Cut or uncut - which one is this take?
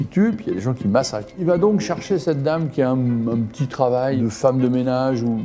cut